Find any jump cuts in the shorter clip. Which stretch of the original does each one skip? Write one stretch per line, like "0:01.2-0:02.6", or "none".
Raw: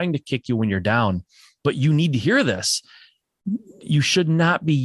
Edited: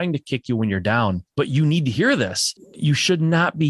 0:01.2-0:01.5
0:02.9-0:03.7